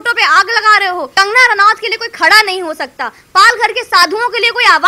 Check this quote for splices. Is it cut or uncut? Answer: cut